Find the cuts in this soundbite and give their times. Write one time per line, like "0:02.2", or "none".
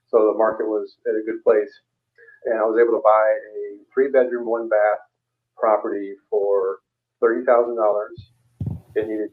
none